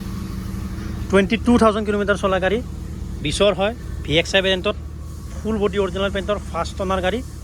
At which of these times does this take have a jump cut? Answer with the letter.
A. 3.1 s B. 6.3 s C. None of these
C